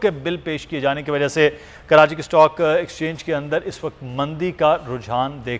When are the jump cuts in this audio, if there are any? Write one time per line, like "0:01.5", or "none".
none